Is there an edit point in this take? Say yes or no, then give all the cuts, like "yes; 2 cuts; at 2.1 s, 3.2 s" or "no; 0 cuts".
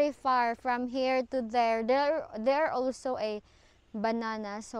no; 0 cuts